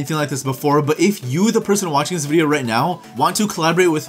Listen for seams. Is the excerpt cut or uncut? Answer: cut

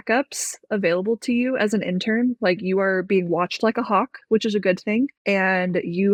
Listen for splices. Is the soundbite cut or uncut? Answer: uncut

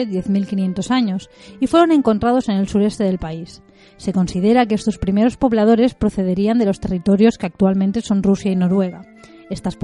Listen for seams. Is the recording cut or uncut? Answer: cut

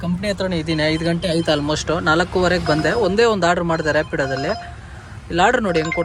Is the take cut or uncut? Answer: uncut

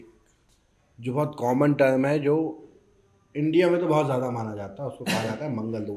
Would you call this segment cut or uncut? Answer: uncut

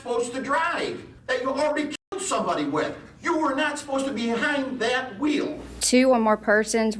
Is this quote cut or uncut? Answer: cut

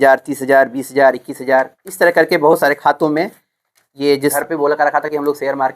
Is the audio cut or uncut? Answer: cut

